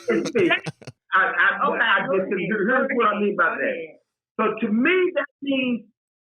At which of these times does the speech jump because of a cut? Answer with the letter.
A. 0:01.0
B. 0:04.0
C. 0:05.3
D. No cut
A